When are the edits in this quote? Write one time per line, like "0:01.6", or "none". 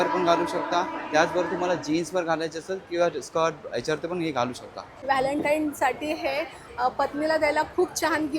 0:05.0